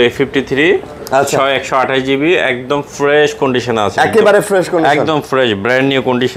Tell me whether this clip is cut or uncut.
uncut